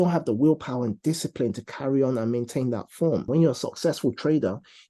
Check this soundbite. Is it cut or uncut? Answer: cut